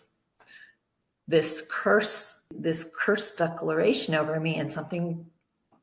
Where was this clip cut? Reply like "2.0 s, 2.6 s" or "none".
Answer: 2.5 s